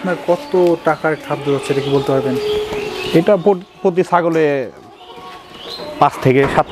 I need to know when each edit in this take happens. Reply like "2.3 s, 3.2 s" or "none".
none